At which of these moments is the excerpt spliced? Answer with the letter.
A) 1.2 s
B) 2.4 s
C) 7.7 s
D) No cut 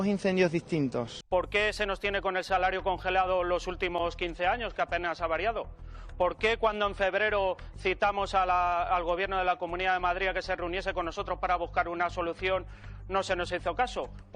A